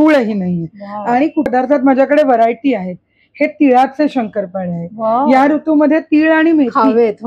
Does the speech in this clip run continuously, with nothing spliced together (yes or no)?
no